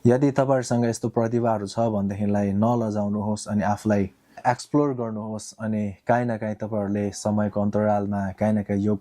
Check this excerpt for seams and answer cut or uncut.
cut